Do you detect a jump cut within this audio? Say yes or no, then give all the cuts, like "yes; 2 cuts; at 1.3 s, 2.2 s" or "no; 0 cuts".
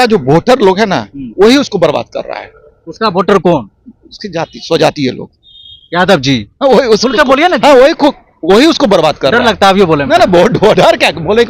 no; 0 cuts